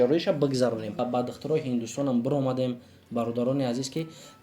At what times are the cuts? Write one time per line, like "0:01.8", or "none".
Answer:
0:01.0